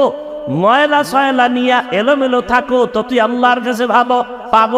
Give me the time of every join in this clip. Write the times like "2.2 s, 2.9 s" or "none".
none